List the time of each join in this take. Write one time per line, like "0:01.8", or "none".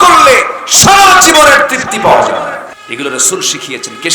0:02.7

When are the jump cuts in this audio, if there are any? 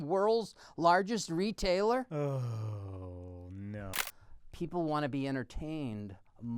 0:02.1
0:03.9

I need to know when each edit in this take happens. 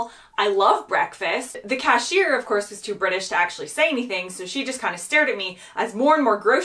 0:01.6

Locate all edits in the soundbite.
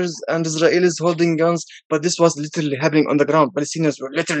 none

